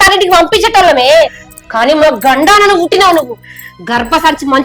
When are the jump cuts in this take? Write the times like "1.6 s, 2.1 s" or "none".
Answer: none